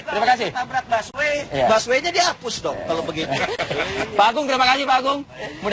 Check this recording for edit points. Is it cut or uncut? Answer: uncut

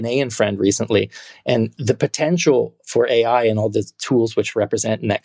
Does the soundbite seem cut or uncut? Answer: cut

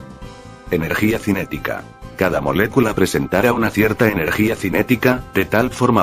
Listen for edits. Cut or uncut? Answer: uncut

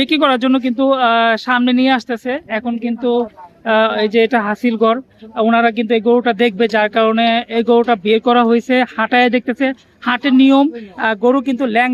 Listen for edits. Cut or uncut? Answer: uncut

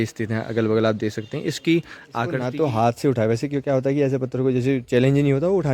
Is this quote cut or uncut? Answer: cut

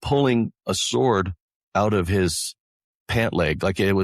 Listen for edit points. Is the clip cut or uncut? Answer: uncut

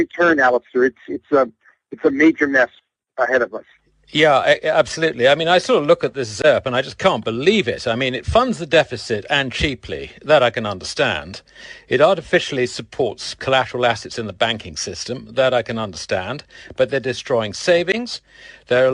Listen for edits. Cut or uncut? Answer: uncut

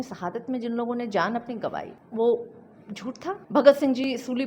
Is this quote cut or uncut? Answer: cut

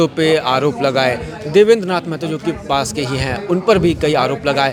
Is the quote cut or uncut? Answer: uncut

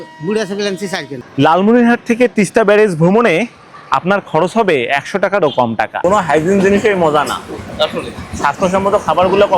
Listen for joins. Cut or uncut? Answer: cut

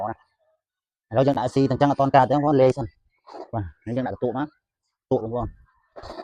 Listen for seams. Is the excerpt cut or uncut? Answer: uncut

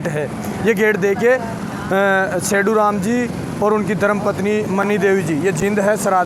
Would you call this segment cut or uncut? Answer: uncut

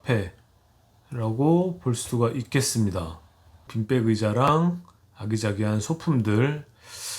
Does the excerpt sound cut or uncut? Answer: cut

